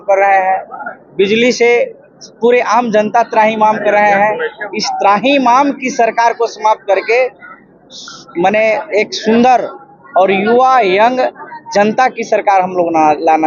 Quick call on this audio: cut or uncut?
uncut